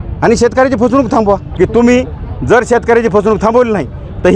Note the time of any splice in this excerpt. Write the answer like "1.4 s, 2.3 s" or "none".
1.5 s